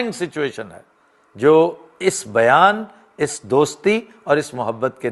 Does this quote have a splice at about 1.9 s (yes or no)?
no